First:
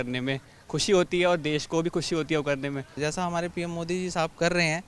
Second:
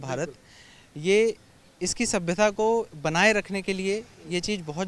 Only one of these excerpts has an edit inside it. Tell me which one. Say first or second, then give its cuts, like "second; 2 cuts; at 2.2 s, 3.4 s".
first; 1 cut; at 2.9 s